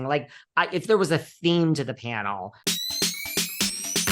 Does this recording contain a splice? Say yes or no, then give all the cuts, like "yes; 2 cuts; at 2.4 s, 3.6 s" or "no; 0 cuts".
yes; 1 cut; at 2.6 s